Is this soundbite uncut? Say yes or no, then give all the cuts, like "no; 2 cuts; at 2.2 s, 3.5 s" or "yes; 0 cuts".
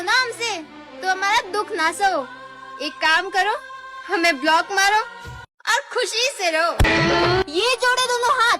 no; 1 cut; at 6.8 s